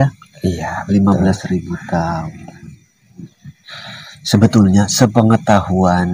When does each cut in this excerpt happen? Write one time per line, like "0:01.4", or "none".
none